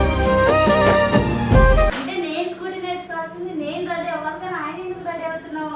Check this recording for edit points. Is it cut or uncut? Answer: cut